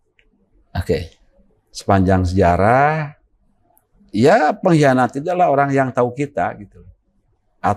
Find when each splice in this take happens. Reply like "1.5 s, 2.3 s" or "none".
none